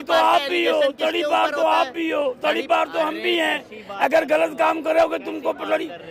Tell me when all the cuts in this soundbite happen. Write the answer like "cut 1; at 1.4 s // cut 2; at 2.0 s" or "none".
none